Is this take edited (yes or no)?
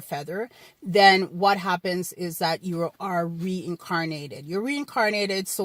no